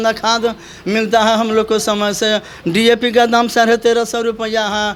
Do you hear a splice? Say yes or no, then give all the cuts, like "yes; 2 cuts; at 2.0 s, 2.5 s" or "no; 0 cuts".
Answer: no; 0 cuts